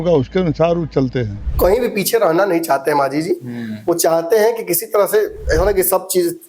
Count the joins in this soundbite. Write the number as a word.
one